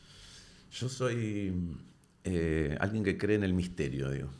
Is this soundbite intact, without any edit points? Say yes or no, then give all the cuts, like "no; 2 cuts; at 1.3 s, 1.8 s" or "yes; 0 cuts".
yes; 0 cuts